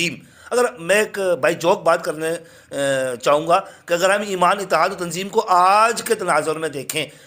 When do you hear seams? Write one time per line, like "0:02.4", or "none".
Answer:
none